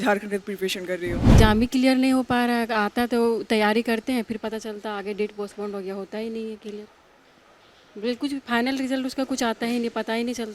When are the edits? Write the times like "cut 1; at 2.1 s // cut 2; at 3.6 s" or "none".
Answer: cut 1; at 1.3 s